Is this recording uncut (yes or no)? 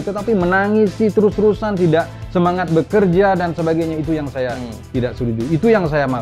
yes